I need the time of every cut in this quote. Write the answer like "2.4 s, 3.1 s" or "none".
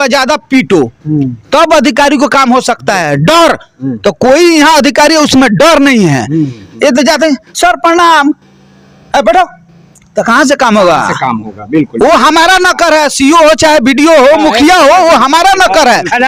none